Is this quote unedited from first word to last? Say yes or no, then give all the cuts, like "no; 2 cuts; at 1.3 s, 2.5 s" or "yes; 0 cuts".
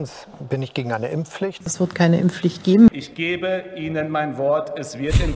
no; 2 cuts; at 1.7 s, 3.0 s